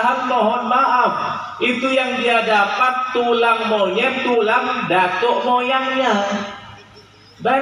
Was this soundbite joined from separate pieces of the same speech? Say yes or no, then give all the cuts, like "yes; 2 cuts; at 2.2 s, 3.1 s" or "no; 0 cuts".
no; 0 cuts